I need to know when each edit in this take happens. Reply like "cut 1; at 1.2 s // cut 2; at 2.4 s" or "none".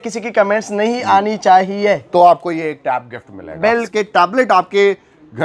cut 1; at 3.9 s